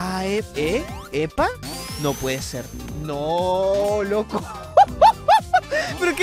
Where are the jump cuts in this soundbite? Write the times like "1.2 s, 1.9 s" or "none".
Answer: none